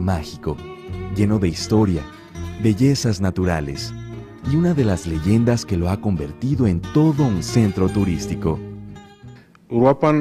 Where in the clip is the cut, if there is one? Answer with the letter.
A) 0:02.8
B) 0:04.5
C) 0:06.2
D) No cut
A